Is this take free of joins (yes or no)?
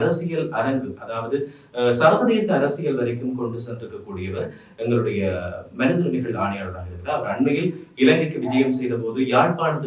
yes